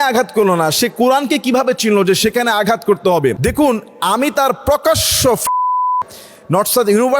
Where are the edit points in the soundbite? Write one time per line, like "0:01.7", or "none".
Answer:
0:03.4